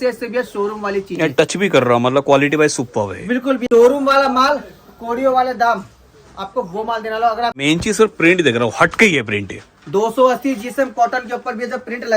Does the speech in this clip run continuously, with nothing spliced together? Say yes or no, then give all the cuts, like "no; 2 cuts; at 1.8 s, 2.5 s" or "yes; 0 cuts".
no; 2 cuts; at 3.6 s, 7.6 s